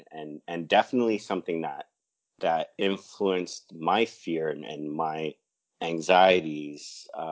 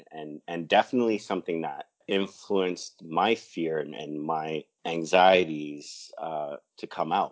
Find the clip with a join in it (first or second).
second